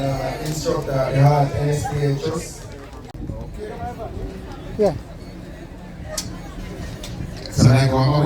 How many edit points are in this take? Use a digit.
1